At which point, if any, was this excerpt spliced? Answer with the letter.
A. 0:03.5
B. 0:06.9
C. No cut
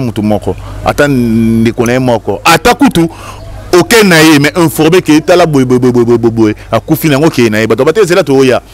C